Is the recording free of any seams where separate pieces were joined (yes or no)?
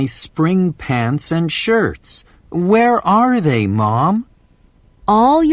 no